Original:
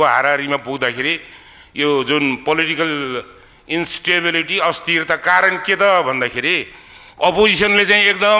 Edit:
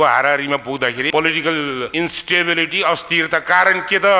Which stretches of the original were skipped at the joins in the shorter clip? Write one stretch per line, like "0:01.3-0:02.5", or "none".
0:01.1-0:02.4
0:03.2-0:03.7

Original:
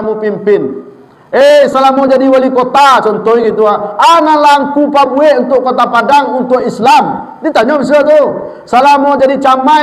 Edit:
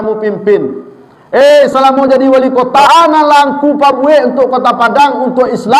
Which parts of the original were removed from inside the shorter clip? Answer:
0:02.9-0:04.0

